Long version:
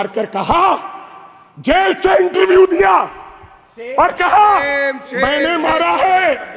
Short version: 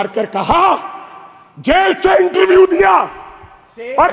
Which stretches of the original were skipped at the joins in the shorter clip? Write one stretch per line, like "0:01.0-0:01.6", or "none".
none